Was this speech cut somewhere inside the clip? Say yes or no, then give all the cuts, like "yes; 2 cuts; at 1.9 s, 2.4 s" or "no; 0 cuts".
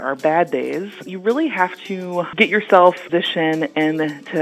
yes; 3 cuts; at 1.1 s, 2.3 s, 3.0 s